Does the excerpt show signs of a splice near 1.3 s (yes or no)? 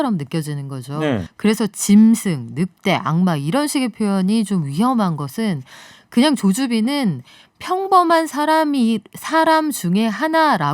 yes